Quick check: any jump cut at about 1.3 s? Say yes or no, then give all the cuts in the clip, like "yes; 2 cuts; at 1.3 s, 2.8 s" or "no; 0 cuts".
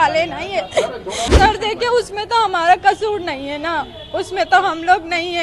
yes; 1 cut; at 1.3 s